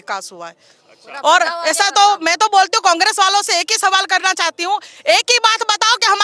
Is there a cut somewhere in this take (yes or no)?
no